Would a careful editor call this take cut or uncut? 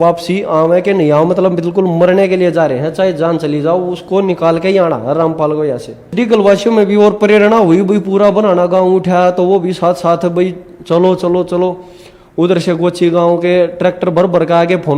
cut